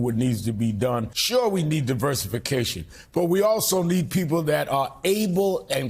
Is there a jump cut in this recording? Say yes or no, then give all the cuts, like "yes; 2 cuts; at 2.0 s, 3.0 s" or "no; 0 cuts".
yes; 1 cut; at 1.2 s